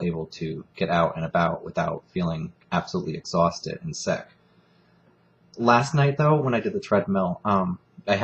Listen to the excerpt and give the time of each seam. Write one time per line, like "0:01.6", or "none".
0:02.5